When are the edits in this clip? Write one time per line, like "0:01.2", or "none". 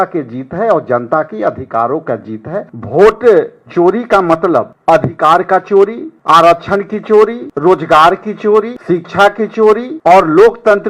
0:02.8
0:04.7
0:06.1
0:07.4
0:08.8
0:09.9

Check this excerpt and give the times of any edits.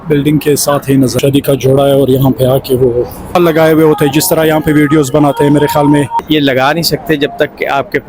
0:01.2
0:03.4
0:06.2

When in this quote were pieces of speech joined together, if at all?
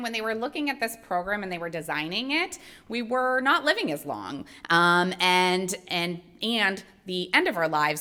none

